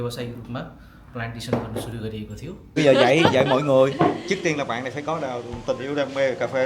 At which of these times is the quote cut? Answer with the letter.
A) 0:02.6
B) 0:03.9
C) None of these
A